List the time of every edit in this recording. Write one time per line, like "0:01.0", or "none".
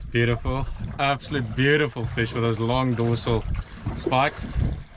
none

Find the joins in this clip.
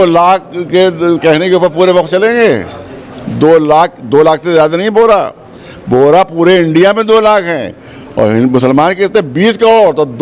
none

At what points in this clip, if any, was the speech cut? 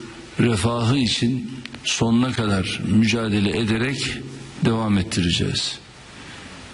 none

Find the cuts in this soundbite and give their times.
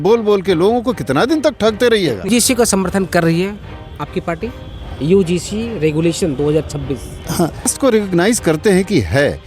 0:02.3
0:07.7

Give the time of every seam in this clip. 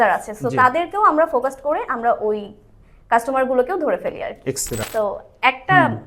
0:04.8

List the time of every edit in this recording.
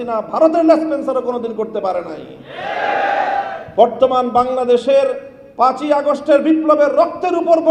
none

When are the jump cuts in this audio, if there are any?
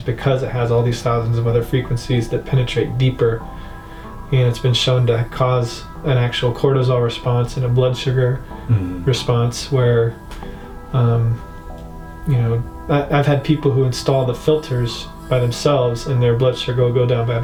none

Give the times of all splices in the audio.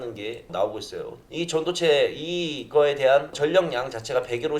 0:01.2

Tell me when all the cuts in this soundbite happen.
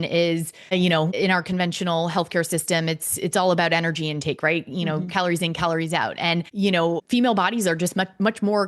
0:01.1
0:06.8

